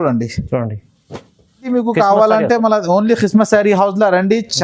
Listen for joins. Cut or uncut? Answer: cut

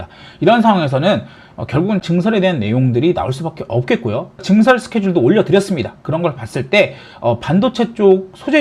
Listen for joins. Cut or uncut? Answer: cut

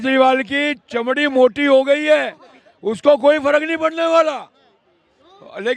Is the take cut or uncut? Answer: uncut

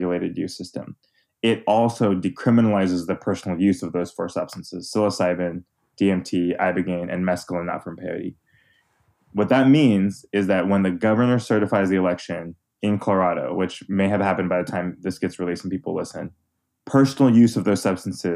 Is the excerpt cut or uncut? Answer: uncut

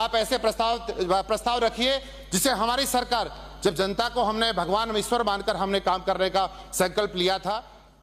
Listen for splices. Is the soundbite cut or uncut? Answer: uncut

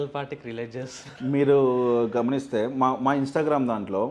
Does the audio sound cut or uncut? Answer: uncut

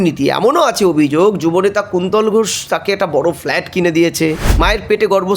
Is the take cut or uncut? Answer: cut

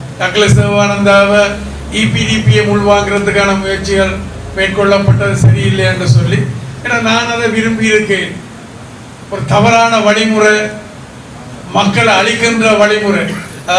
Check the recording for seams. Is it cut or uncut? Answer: uncut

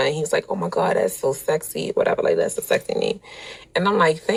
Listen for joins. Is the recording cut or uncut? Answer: uncut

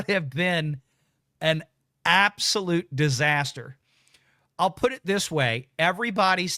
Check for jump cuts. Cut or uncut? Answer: uncut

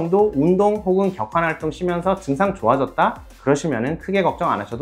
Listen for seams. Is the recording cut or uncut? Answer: uncut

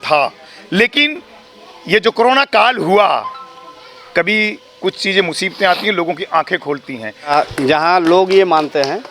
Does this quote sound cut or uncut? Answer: cut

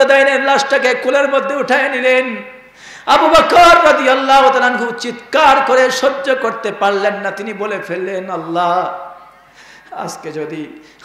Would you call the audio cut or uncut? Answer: uncut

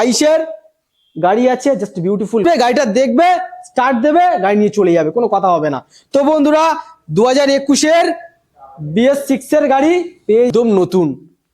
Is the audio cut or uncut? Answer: cut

